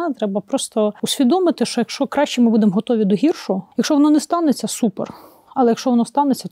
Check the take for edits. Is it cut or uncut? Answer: cut